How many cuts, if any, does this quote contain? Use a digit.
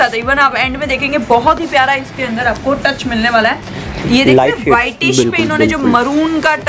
1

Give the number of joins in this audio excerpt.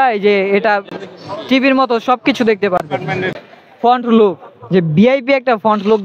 1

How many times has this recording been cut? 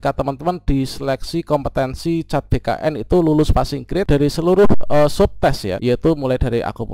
2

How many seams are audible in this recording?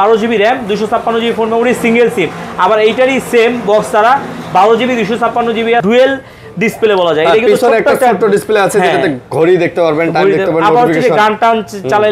1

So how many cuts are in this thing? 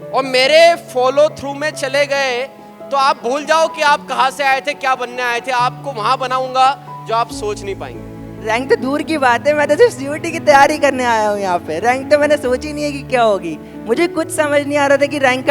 1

